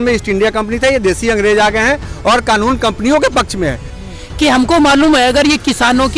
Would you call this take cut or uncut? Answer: cut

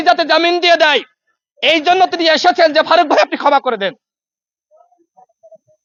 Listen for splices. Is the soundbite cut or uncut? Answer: uncut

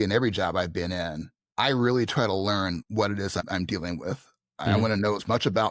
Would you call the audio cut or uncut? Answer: uncut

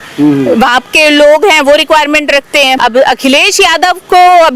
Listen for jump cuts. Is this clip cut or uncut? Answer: cut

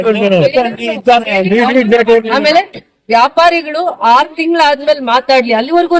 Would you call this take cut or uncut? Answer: cut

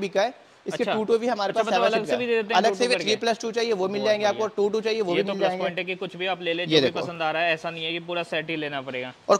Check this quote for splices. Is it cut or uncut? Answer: uncut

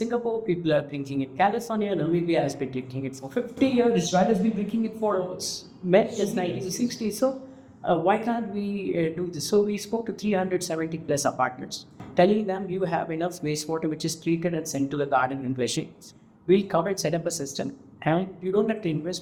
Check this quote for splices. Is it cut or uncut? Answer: uncut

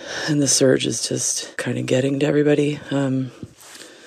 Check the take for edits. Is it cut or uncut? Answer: cut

